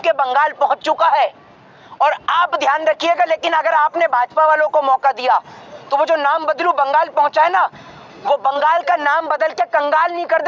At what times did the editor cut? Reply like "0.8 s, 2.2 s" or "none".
none